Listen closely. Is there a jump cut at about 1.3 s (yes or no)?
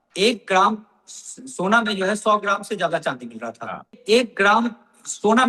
no